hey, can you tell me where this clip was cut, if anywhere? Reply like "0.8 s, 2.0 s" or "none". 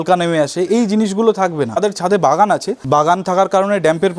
1.8 s, 2.7 s

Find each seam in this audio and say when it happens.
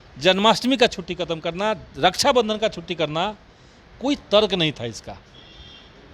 none

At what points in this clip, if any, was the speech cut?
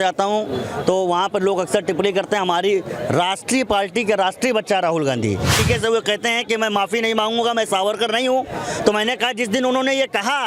5.6 s

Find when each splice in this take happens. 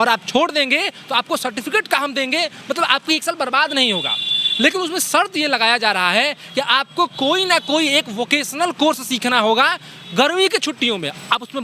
none

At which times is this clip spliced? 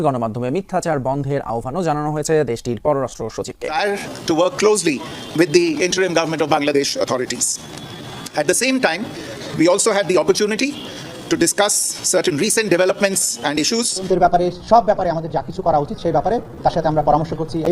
3.7 s, 14.1 s

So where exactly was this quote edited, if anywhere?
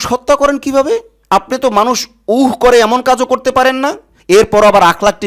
1.2 s, 4.1 s

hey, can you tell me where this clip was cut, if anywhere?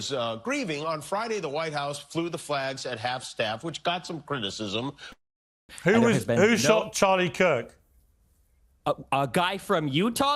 5.7 s

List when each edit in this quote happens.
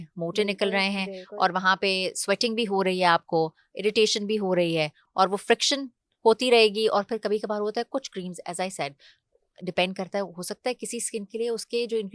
none

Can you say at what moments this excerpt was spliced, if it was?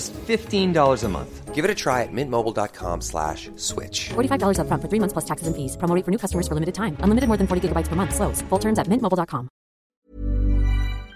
10.0 s

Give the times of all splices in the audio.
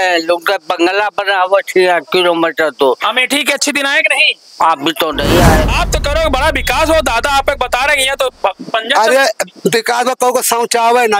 5.7 s

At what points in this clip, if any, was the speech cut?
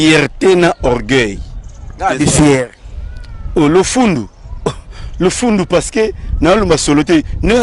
none

